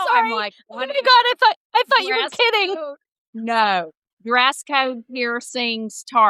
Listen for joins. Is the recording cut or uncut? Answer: uncut